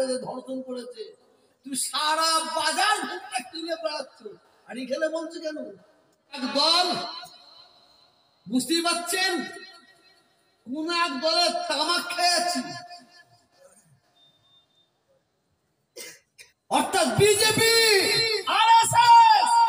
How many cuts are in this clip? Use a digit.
1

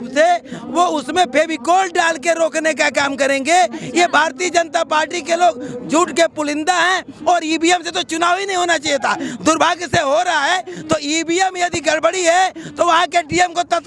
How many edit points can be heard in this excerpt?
0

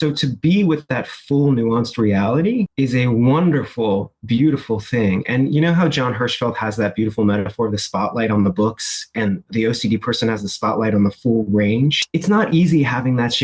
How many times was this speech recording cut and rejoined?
2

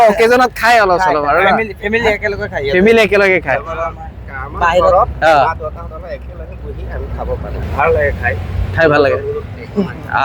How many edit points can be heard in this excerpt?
1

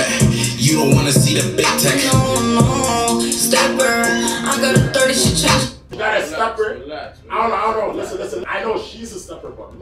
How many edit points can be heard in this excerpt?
2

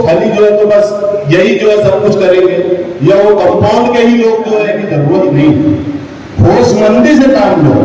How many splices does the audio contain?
1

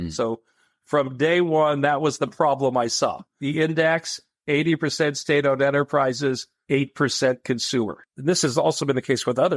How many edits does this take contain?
1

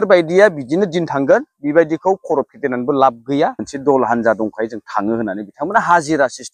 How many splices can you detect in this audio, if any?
1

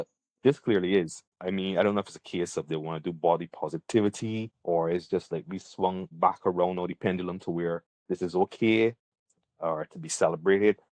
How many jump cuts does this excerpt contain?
0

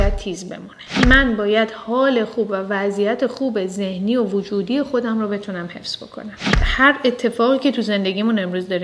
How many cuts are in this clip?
2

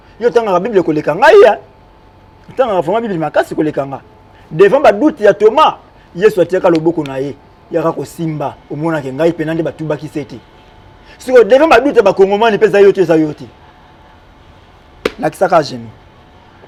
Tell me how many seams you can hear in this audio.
0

